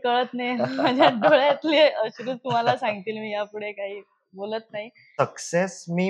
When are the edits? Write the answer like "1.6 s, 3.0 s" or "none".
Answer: 5.0 s